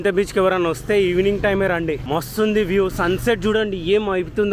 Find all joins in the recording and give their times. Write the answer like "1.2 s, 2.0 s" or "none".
none